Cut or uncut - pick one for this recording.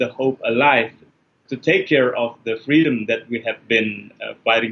cut